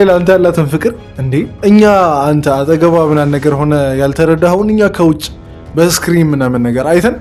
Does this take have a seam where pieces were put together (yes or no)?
no